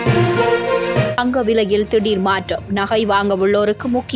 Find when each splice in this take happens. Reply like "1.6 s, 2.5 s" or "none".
1.1 s